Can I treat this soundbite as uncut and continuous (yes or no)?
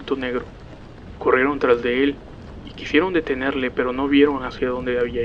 no